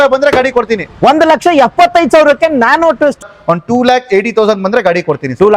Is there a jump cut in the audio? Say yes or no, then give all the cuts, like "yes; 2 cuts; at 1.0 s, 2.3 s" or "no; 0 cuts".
yes; 1 cut; at 3.2 s